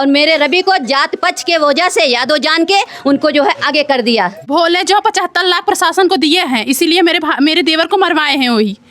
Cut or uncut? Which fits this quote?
cut